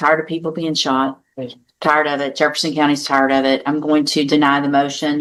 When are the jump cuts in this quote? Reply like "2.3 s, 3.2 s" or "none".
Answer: none

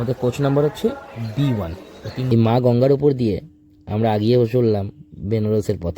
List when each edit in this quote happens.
2.2 s

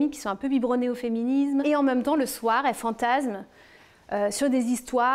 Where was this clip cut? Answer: 1.6 s

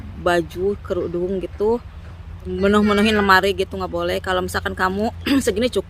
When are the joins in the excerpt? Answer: 2.5 s

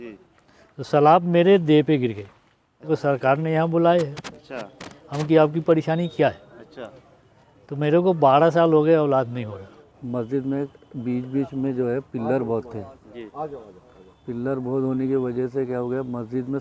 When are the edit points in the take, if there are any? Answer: 2.9 s, 9.9 s

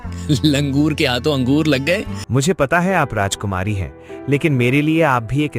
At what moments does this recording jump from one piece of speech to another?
2.2 s

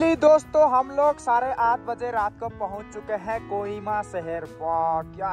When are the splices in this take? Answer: none

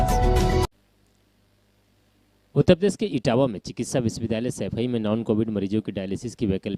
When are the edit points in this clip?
none

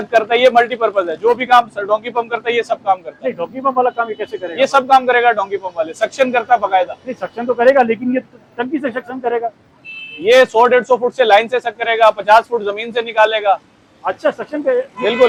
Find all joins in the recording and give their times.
none

